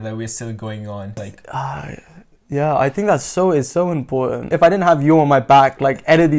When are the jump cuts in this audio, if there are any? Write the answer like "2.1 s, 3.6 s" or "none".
1.2 s, 4.5 s